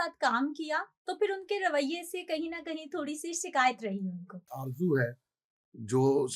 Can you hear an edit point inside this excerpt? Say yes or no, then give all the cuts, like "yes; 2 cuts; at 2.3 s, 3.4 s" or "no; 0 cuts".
yes; 1 cut; at 4.6 s